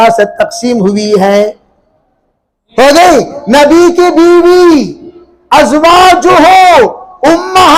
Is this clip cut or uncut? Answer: uncut